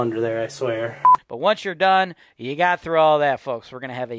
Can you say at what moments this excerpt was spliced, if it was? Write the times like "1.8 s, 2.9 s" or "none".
1.2 s